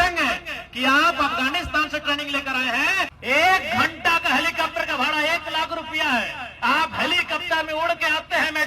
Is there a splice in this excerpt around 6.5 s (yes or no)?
no